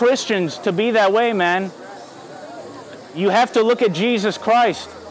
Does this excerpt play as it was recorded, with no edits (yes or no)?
yes